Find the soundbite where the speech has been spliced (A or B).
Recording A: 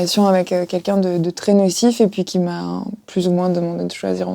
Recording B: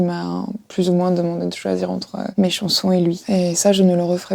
B